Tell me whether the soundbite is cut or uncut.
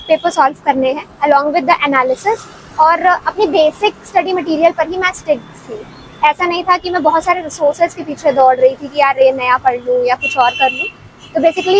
uncut